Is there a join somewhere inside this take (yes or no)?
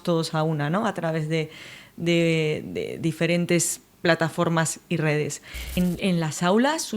yes